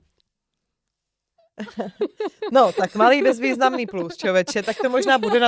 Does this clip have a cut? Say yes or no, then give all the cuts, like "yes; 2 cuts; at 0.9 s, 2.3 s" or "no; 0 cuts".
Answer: no; 0 cuts